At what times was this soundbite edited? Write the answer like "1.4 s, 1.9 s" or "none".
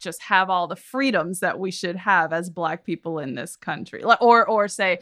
none